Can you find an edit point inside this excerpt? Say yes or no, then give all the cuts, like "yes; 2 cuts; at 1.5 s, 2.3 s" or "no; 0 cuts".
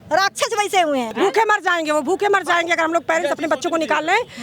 yes; 1 cut; at 1.1 s